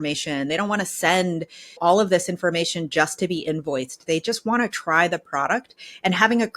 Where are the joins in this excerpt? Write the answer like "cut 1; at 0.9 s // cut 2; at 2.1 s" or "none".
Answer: cut 1; at 1.8 s